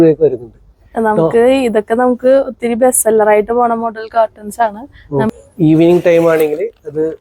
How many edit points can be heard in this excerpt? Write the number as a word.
one